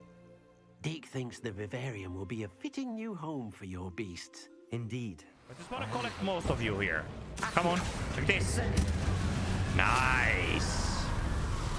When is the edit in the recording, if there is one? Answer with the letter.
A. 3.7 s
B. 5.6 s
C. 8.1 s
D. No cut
B